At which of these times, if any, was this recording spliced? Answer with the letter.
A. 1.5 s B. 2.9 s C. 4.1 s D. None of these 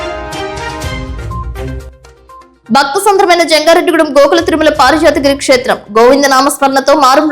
A